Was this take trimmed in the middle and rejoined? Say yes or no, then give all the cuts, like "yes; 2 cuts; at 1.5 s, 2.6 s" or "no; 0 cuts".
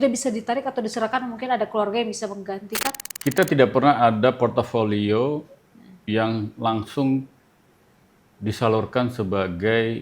yes; 1 cut; at 3.0 s